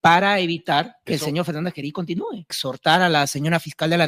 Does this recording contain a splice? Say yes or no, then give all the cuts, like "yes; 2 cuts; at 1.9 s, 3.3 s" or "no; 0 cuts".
no; 0 cuts